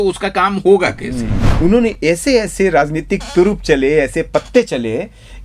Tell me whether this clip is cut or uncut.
cut